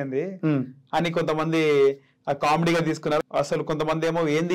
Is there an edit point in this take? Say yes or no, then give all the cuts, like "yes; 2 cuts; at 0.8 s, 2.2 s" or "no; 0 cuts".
yes; 1 cut; at 3.2 s